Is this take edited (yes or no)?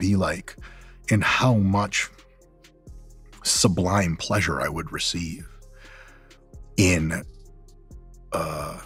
no